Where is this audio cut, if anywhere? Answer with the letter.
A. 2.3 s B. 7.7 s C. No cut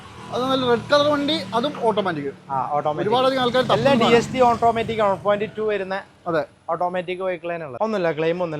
B